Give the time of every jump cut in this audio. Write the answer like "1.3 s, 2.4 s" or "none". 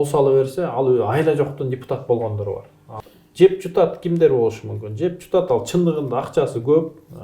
2.8 s